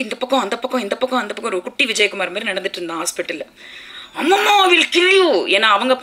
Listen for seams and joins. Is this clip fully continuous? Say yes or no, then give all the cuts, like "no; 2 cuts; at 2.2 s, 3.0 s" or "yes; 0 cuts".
yes; 0 cuts